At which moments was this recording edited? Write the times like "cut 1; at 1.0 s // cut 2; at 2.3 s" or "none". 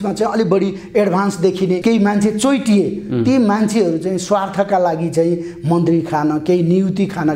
cut 1; at 1.8 s